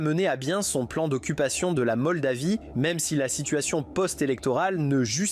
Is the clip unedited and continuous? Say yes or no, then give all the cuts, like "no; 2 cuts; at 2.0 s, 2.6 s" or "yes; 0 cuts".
yes; 0 cuts